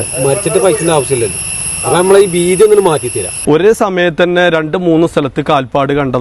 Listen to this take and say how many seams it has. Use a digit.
1